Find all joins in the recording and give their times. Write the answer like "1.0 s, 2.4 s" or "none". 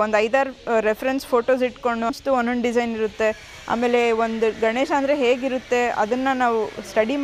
2.1 s